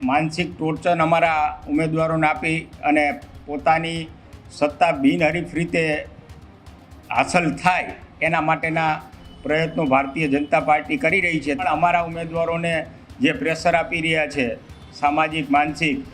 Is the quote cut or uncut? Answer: cut